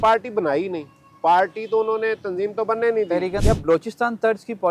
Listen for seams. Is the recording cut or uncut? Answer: cut